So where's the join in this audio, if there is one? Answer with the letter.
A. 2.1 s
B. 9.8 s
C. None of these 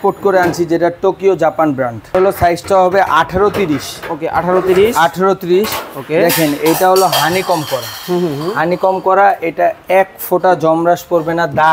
A